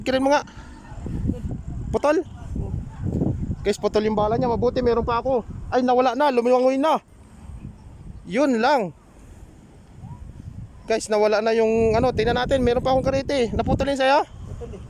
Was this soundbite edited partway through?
no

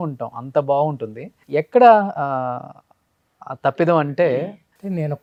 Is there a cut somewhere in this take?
no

